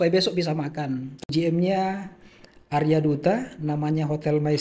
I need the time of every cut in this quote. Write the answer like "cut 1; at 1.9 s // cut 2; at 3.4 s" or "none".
cut 1; at 1.1 s